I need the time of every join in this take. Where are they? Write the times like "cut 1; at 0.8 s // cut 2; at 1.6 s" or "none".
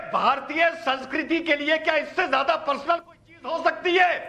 none